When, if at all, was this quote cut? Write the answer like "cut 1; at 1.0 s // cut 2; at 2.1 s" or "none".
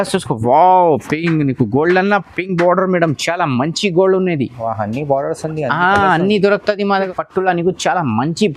cut 1; at 7.1 s